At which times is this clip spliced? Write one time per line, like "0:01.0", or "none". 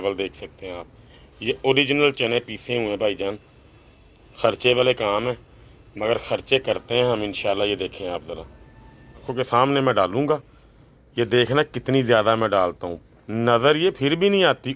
0:09.3